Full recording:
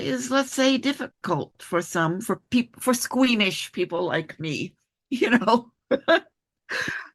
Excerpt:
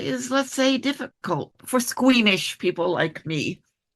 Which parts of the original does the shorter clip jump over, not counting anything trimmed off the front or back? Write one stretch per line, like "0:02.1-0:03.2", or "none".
0:01.6-0:02.7